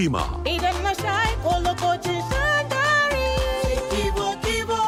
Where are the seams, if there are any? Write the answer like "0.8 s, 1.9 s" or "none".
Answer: none